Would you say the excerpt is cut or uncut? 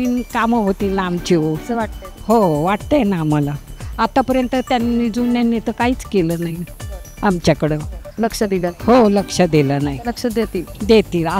uncut